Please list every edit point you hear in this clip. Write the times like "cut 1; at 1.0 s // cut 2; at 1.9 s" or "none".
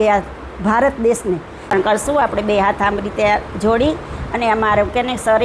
cut 1; at 1.6 s